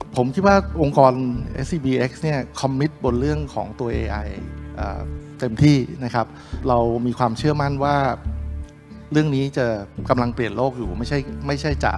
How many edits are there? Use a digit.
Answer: 1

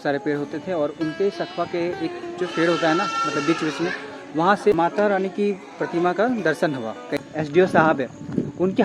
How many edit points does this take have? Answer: 2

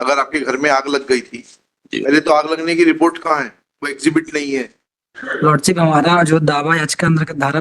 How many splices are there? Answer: 1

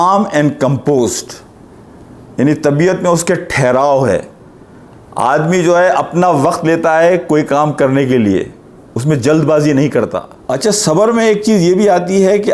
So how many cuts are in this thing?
1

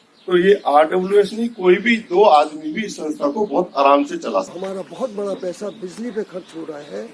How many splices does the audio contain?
1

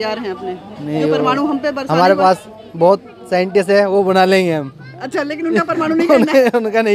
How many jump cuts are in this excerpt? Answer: 0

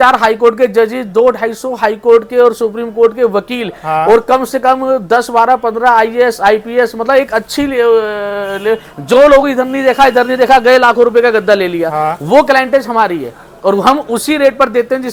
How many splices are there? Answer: 0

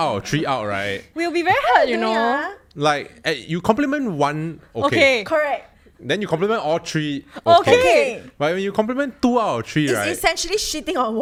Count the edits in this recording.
0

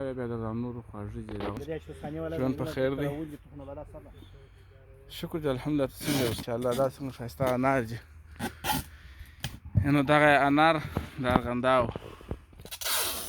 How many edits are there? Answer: 2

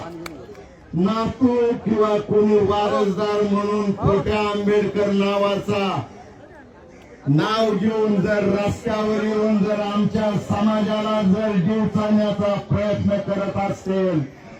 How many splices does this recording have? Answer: 0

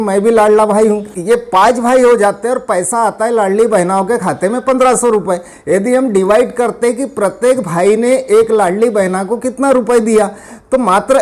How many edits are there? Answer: 1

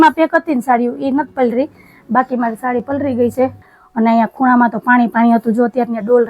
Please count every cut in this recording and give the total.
1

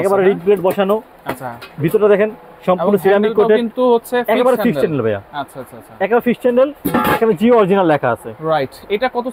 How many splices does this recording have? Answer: 0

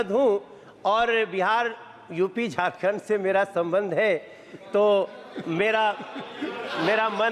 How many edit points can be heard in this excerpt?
0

